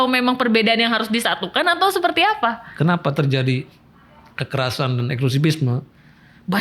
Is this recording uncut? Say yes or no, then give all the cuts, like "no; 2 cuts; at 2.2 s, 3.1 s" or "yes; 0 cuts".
no; 1 cut; at 2.7 s